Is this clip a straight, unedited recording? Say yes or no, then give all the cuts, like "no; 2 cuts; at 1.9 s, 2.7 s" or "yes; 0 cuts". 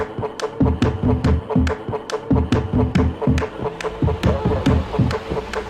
no; 2 cuts; at 1.2 s, 2.9 s